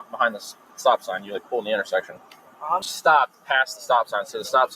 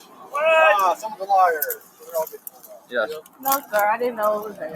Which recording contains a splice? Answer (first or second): first